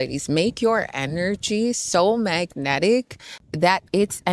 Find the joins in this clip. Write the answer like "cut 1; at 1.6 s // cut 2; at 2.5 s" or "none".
none